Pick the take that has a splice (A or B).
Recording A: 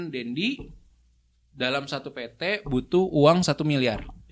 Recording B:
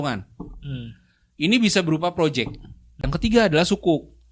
B